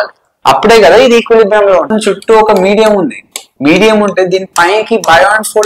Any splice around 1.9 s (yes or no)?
yes